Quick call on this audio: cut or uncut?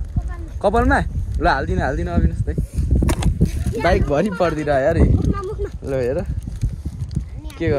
uncut